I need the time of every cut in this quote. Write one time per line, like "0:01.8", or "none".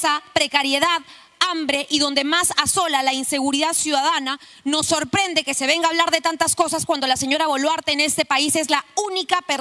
none